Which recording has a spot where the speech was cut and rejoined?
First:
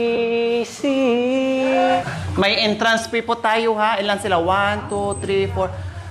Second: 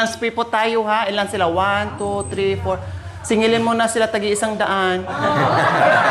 first; 1 cut; at 2.0 s

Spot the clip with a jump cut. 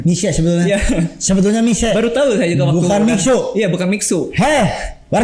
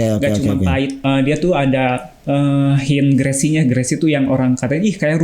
second; 2 cuts; at 1.0 s, 2.1 s

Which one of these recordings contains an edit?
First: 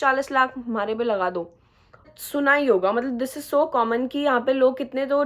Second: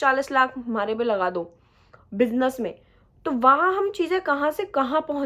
first; 1 cut; at 2.1 s

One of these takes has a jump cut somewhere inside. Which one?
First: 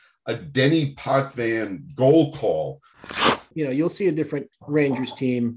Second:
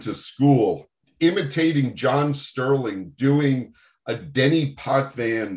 first; 1 cut; at 3.0 s

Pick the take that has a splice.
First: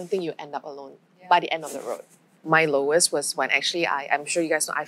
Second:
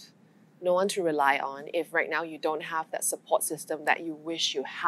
first; 1 cut; at 2.4 s

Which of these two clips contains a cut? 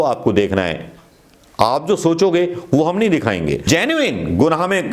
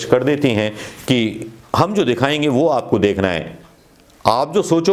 first; 1 cut; at 3.7 s

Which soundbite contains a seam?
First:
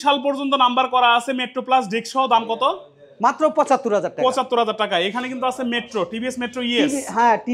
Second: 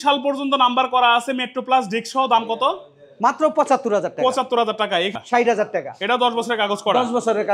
second; 1 cut; at 5.2 s

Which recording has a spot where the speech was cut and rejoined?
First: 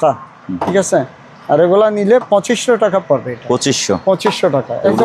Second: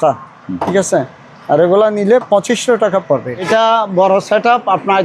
second; 1 cut; at 3.3 s

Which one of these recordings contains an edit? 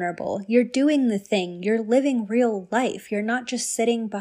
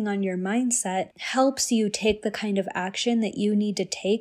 second; 1 cut; at 1.2 s

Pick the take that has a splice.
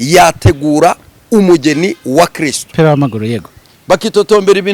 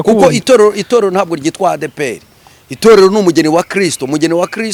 first; 1 cut; at 2.7 s

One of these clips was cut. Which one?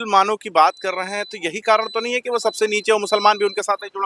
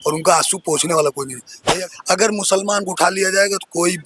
second; 1 cut; at 1.5 s

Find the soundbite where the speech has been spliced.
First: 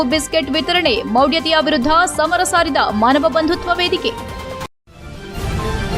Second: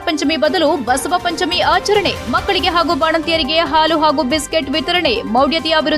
first; 1 cut; at 4.7 s

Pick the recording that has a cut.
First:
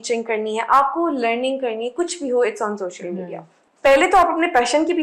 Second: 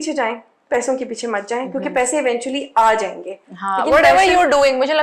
first; 1 cut; at 3.5 s

